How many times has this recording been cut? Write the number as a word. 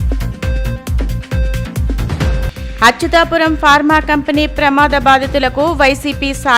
one